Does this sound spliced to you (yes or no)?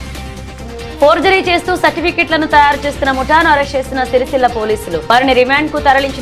no